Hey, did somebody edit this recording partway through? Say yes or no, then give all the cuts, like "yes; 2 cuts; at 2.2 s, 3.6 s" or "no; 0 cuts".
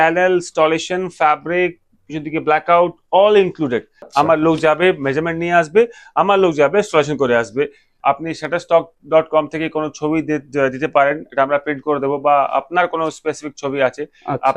yes; 2 cuts; at 4.1 s, 7.8 s